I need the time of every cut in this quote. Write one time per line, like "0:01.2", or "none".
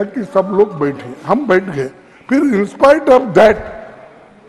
none